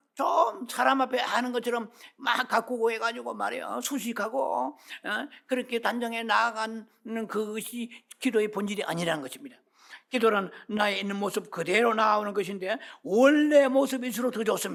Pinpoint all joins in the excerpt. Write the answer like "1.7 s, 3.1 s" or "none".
none